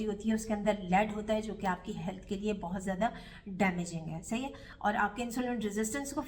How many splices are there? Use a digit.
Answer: 1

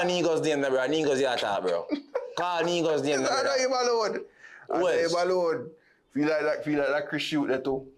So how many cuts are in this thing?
0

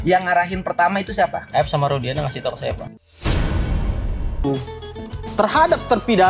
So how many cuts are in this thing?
1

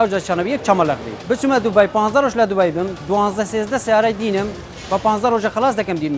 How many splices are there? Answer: 1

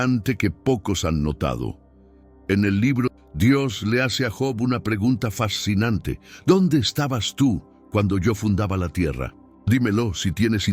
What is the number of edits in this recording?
1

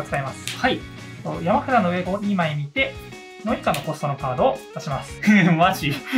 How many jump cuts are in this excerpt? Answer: 2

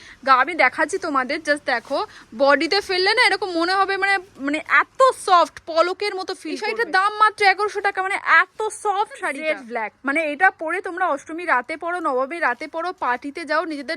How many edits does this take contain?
2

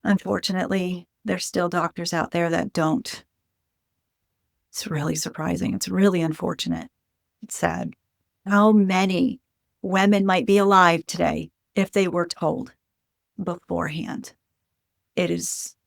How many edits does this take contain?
1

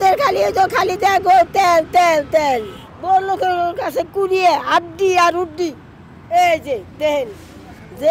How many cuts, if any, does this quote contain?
1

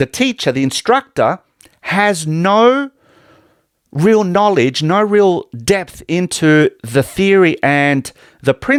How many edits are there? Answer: 0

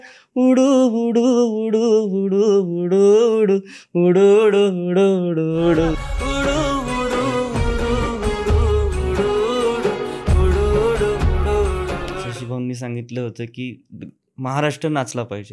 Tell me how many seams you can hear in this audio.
2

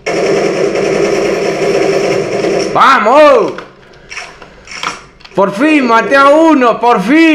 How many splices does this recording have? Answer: 0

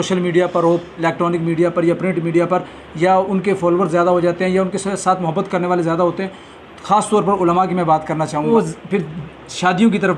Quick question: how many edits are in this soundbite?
1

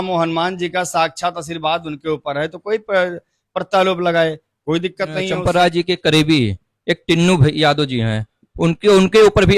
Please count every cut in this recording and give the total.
1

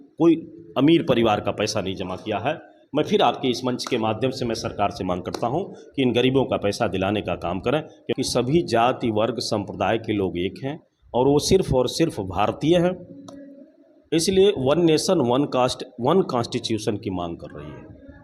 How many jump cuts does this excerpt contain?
1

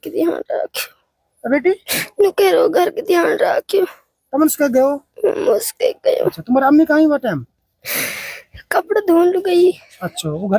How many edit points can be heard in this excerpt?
0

